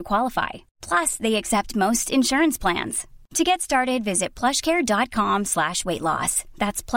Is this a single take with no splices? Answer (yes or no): yes